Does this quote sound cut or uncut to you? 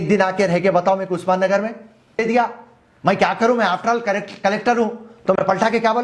cut